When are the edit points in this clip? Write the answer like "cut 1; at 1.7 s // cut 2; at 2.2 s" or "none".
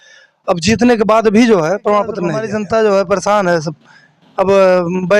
cut 1; at 2.4 s